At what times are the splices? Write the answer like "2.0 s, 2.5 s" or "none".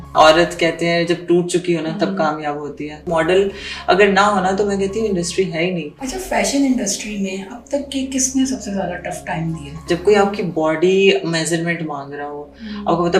3.1 s, 5.9 s, 9.7 s